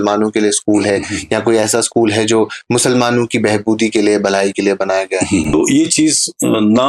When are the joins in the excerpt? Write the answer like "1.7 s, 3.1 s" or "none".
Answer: 5.5 s